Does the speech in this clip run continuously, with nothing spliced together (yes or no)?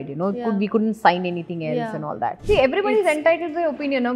no